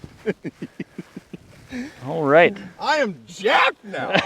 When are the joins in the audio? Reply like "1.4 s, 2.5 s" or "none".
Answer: 2.7 s